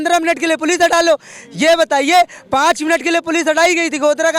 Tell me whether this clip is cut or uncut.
uncut